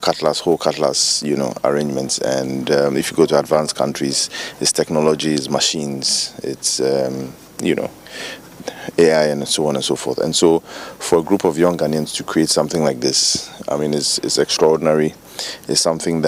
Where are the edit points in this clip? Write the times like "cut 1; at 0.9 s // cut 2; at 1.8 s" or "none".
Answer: none

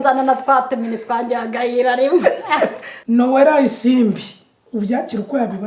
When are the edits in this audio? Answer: cut 1; at 2.9 s

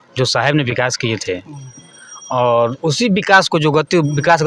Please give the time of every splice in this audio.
none

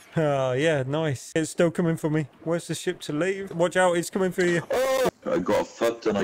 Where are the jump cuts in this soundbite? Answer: cut 1; at 1.4 s // cut 2; at 3.5 s // cut 3; at 5.1 s

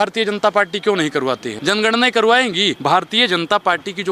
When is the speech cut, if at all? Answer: cut 1; at 1.5 s // cut 2; at 2.8 s

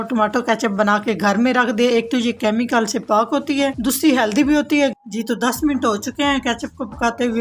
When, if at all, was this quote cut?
cut 1; at 5.0 s

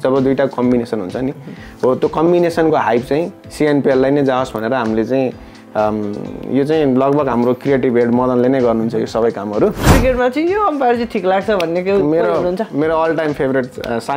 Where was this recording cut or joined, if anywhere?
cut 1; at 9.9 s

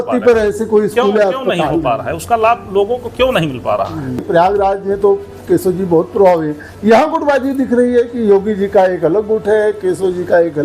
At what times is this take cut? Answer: cut 1; at 4.2 s

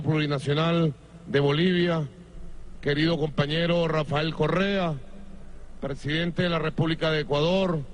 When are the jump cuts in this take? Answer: cut 1; at 3.7 s

